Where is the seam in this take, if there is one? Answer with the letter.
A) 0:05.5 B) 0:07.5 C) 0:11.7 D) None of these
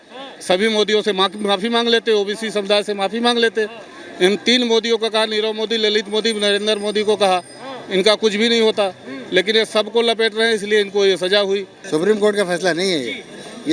C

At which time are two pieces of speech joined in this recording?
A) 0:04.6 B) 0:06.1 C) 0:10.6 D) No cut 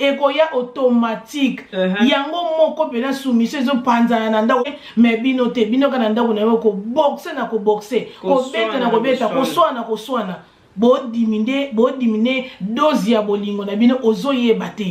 A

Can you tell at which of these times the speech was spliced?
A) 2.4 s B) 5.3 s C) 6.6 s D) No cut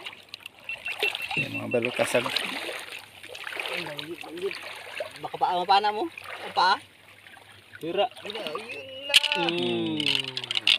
A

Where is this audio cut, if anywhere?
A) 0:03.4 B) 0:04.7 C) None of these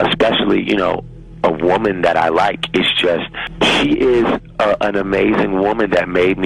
A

